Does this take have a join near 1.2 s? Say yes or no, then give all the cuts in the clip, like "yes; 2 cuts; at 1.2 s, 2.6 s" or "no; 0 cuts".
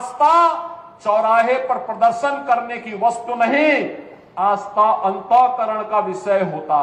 no; 0 cuts